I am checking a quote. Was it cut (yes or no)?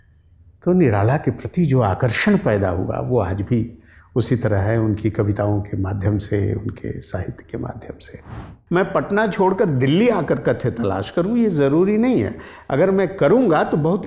yes